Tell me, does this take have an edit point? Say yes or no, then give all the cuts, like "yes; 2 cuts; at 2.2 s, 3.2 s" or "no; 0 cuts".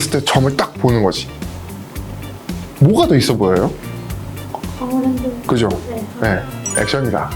no; 0 cuts